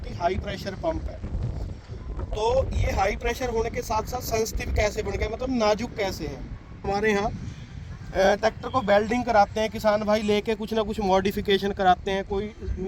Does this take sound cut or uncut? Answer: cut